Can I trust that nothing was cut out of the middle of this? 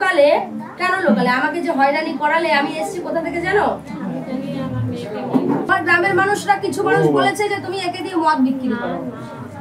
no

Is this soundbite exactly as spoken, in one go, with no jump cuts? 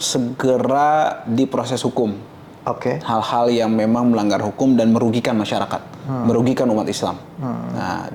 yes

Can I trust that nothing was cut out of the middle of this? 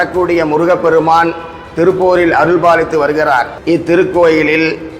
no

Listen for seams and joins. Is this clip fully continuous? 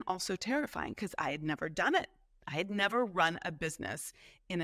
yes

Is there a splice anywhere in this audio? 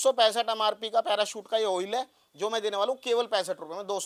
no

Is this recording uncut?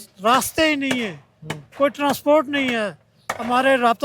yes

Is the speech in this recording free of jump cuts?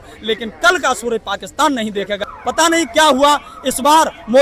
no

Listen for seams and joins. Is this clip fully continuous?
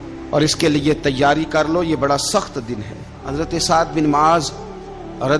no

